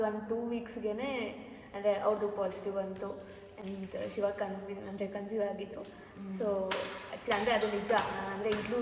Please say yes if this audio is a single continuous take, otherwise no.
yes